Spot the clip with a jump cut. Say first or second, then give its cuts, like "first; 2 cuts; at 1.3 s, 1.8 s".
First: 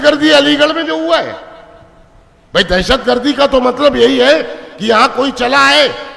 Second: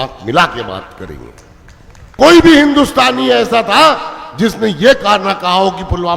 second; 1 cut; at 2.1 s